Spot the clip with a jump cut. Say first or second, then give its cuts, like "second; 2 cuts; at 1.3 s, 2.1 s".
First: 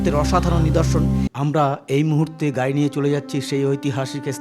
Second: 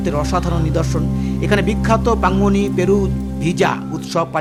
first; 1 cut; at 1.3 s